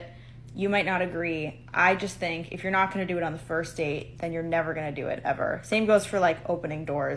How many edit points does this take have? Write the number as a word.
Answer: one